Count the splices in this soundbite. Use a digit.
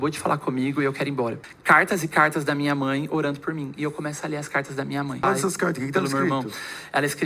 2